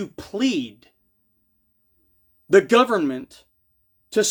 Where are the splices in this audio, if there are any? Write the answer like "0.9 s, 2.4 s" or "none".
none